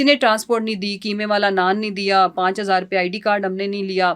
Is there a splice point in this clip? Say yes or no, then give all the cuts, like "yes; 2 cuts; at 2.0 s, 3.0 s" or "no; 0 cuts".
no; 0 cuts